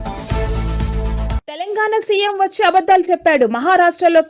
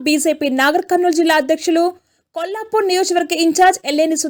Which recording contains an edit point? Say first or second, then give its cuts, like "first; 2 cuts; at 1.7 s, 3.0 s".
first; 1 cut; at 1.4 s